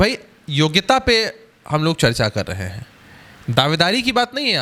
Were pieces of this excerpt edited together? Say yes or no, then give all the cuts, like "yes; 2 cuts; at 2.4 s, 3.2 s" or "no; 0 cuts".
no; 0 cuts